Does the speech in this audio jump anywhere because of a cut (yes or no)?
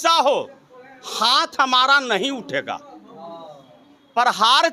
no